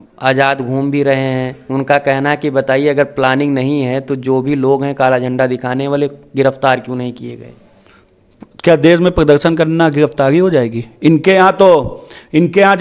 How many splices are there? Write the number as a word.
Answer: zero